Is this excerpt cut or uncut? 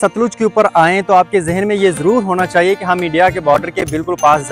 uncut